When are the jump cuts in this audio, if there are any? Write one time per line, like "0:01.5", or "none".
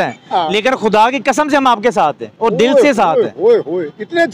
none